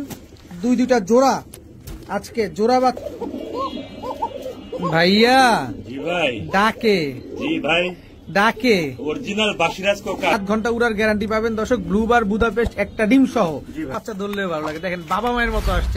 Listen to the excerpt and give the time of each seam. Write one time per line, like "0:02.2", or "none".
0:03.0
0:10.3
0:13.9